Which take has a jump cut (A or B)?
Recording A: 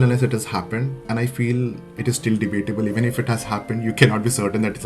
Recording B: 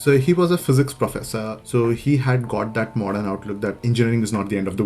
B